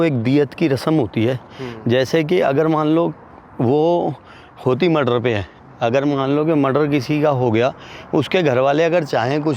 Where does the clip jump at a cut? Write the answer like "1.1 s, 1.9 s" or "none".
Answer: none